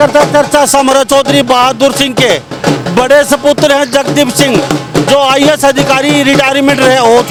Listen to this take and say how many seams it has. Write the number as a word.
zero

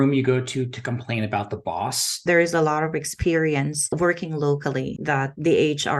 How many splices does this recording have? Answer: three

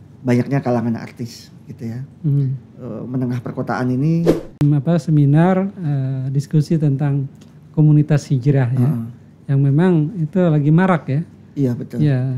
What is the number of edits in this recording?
one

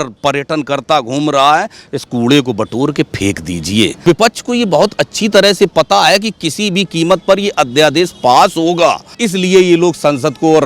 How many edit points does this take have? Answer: two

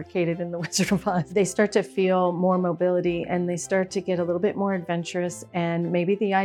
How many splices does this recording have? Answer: one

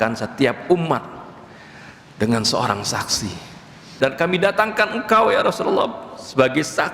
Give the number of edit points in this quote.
one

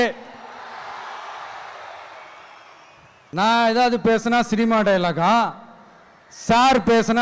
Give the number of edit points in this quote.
one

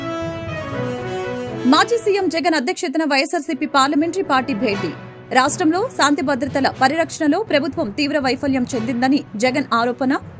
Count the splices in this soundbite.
one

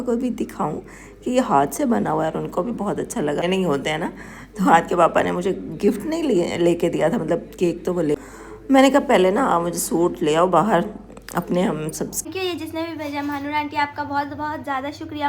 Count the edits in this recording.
three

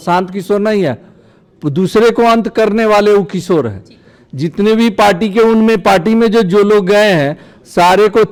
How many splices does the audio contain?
zero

